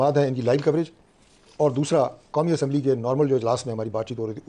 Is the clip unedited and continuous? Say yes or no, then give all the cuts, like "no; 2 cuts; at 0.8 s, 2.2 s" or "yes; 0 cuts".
yes; 0 cuts